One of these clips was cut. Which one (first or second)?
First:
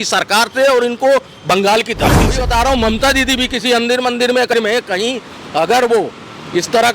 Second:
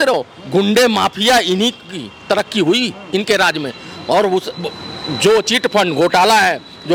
first